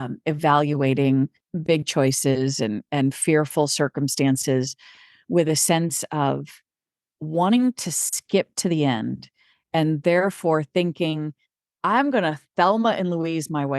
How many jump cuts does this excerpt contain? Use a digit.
1